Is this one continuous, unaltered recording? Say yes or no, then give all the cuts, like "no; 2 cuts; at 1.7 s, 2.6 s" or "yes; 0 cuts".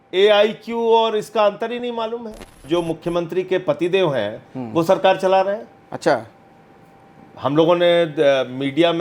no; 1 cut; at 2.6 s